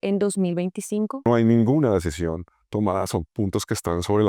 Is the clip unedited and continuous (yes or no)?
no